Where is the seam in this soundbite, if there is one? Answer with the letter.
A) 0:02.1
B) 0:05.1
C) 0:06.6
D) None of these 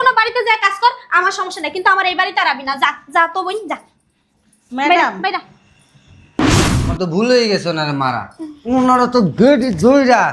C